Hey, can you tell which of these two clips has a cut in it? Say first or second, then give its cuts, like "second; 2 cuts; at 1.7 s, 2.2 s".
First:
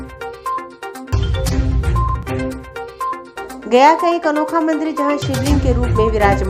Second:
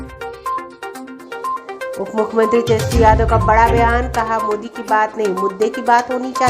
second; 1 cut; at 1.0 s